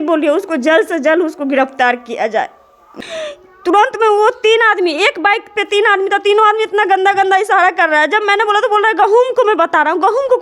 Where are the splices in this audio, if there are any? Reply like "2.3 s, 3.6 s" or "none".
2.9 s